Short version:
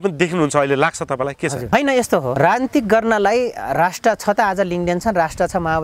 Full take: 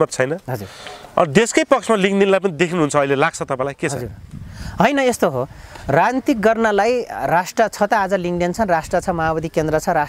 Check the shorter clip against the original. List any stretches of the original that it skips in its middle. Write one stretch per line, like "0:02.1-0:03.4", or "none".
0:04.1-0:04.8
0:05.4-0:05.8